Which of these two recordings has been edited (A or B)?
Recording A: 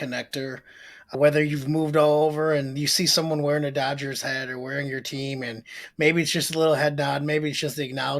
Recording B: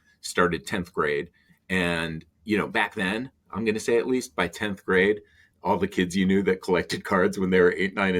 A